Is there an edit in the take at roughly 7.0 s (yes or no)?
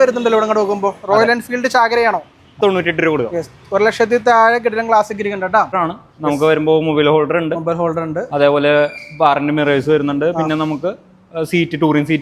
no